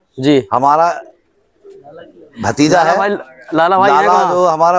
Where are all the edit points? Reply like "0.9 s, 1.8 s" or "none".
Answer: none